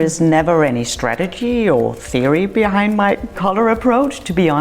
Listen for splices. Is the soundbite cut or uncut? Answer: cut